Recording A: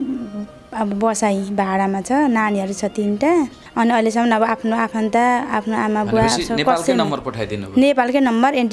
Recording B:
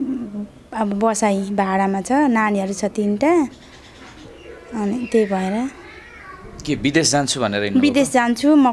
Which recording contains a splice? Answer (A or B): A